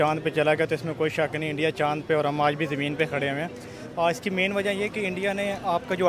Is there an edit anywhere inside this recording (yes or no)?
yes